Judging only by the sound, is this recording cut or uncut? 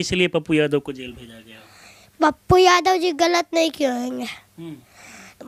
uncut